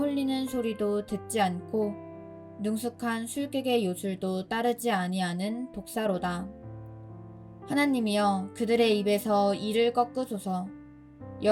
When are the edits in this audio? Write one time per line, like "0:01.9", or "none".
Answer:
0:07.6